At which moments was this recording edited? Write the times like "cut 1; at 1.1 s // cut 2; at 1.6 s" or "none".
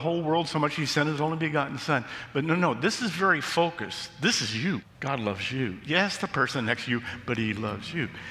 cut 1; at 4.9 s